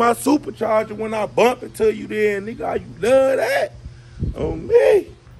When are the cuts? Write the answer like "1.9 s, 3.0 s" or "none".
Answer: none

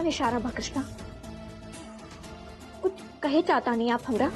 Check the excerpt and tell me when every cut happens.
none

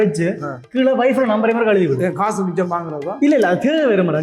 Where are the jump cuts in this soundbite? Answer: none

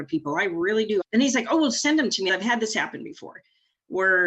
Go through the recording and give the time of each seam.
1.0 s, 2.3 s

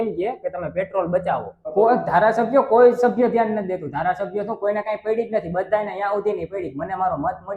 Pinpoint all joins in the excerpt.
1.6 s

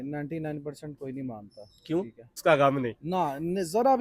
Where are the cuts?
2.4 s

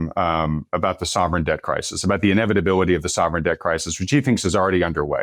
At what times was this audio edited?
none

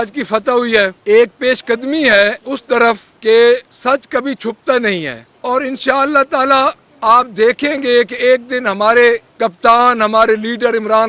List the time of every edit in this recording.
1.0 s, 3.1 s, 3.7 s, 5.2 s, 6.9 s, 9.3 s

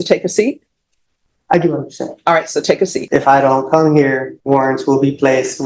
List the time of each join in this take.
3.0 s, 4.3 s

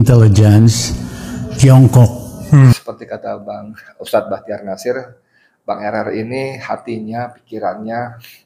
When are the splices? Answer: 2.7 s

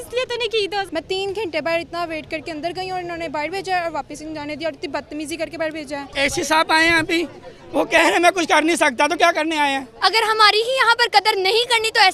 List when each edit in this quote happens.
0.9 s, 6.0 s, 9.9 s

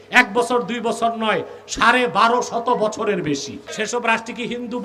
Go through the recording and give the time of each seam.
3.7 s

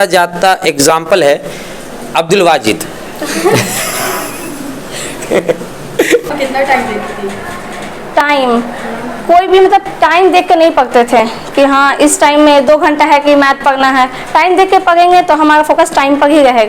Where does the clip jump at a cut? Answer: 6.3 s

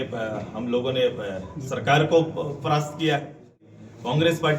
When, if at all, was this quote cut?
3.7 s

